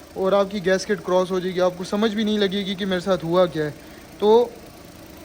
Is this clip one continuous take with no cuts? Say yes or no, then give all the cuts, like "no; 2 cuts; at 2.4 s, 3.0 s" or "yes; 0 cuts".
yes; 0 cuts